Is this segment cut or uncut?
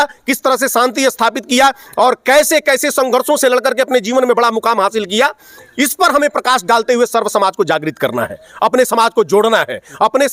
uncut